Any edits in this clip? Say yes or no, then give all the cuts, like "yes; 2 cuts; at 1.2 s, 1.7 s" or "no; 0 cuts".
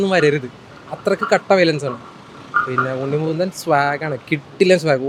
no; 0 cuts